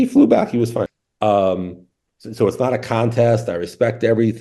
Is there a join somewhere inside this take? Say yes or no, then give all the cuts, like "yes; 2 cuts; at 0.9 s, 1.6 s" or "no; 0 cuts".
yes; 1 cut; at 1.0 s